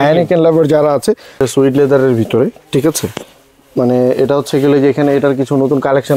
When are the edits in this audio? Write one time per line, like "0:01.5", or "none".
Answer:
0:01.5